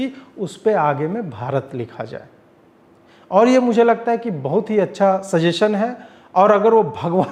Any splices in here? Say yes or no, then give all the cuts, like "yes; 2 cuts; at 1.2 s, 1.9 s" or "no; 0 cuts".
no; 0 cuts